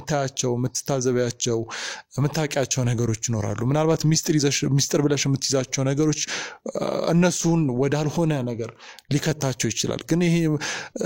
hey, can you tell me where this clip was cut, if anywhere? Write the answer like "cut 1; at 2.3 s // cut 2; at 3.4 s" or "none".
none